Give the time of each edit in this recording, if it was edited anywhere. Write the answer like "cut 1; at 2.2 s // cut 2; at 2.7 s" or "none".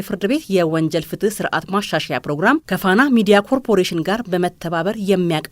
cut 1; at 2.6 s